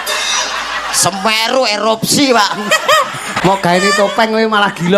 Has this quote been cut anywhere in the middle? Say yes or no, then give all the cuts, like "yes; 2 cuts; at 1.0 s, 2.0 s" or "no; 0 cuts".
yes; 1 cut; at 3.3 s